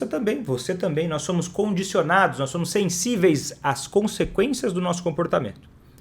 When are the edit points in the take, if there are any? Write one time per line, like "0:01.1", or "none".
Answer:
none

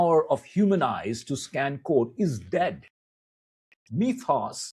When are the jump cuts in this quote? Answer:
none

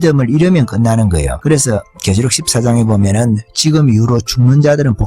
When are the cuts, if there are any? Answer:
0:01.3

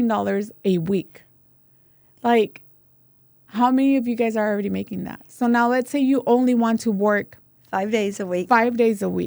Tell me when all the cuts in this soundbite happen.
none

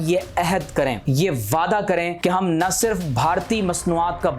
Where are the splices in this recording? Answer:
0:01.0
0:02.1

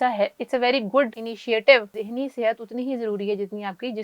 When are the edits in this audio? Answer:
0:01.3
0:02.0

